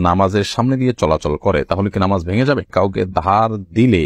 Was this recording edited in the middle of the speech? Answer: yes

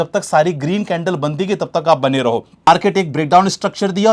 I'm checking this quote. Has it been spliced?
yes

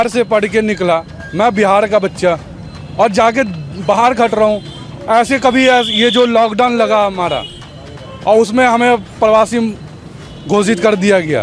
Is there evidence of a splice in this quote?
no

